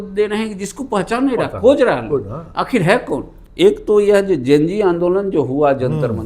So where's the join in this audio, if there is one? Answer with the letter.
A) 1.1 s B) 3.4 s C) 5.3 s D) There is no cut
B